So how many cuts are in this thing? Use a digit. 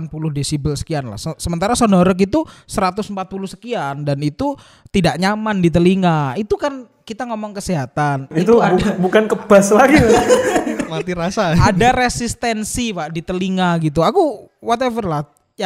0